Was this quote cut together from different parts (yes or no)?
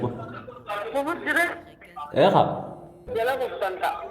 yes